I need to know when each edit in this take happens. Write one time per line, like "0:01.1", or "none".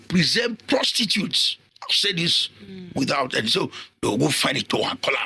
none